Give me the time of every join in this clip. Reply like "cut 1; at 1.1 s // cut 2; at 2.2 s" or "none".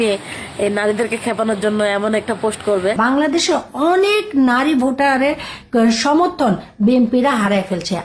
cut 1; at 3.0 s